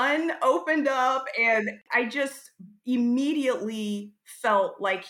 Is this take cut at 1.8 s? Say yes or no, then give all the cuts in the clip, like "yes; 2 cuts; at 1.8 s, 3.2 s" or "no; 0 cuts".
yes; 1 cut; at 1.8 s